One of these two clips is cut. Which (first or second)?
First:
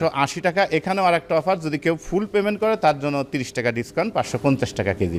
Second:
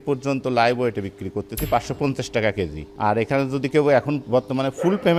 second